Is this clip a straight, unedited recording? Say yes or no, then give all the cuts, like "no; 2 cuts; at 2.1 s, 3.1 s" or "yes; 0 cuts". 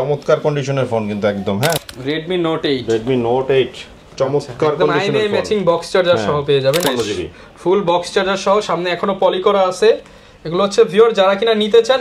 no; 2 cuts; at 1.8 s, 6.8 s